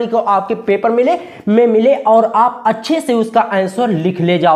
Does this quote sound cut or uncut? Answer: uncut